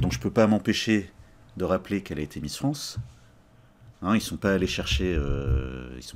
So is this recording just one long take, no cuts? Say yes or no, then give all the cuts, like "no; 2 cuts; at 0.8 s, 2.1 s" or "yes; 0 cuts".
yes; 0 cuts